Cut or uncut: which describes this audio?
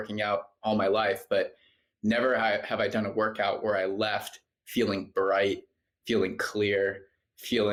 uncut